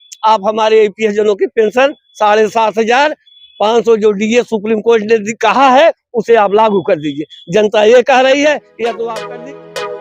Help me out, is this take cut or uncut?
cut